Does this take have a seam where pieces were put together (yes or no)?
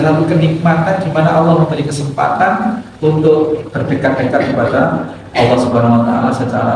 no